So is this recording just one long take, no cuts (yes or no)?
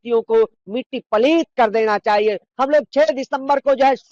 no